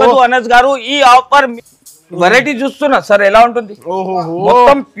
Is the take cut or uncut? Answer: cut